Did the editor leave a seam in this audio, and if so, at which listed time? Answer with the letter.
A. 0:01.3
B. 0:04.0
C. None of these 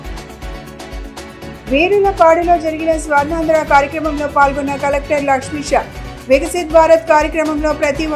A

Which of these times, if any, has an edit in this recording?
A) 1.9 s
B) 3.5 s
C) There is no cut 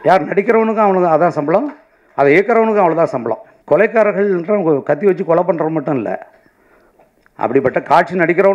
B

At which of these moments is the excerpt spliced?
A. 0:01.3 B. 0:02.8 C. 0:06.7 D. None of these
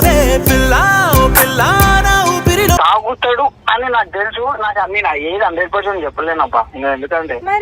B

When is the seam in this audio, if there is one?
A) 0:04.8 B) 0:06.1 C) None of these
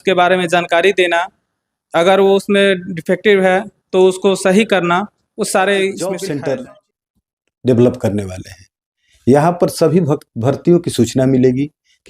B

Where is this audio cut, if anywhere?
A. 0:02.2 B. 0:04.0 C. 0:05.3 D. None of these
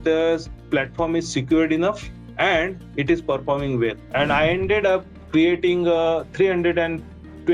B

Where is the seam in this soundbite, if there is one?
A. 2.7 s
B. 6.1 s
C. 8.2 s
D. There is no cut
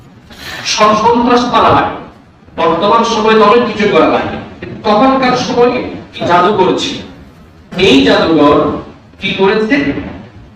B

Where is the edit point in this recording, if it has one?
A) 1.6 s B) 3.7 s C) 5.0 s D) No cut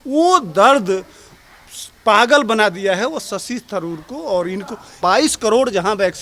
C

